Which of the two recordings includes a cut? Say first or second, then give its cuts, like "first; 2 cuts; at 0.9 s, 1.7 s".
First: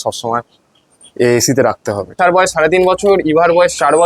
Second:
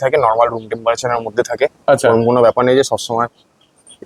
first; 1 cut; at 2.1 s